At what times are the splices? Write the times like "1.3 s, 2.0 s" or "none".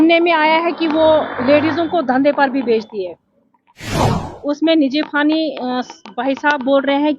4.1 s